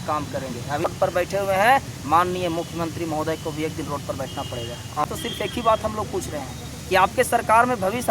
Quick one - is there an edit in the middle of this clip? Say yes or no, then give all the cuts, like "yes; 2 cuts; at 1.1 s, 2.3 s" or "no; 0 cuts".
yes; 2 cuts; at 0.9 s, 5.0 s